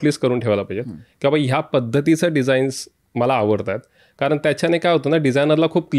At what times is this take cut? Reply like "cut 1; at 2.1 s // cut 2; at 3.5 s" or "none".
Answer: none